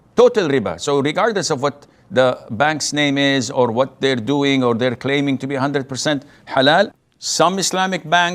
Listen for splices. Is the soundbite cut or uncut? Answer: cut